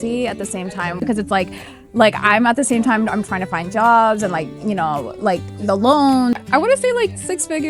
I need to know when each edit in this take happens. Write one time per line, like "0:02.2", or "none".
0:01.0
0:06.4